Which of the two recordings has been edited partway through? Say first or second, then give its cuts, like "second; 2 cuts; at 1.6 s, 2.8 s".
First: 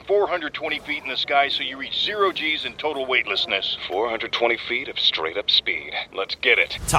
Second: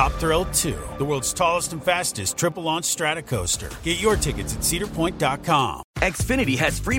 second; 1 cut; at 5.8 s